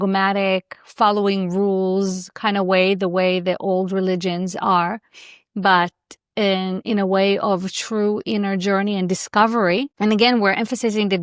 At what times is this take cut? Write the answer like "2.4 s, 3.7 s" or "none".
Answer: 9.9 s